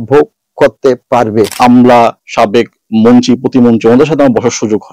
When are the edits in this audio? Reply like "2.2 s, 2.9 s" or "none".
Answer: 1.5 s